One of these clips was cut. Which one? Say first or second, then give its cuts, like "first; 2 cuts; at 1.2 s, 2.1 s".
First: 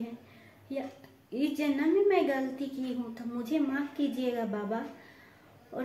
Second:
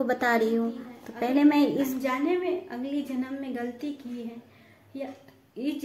second; 1 cut; at 1.9 s